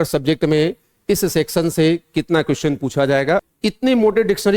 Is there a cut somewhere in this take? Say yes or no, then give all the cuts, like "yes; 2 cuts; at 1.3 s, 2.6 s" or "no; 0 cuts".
yes; 1 cut; at 3.5 s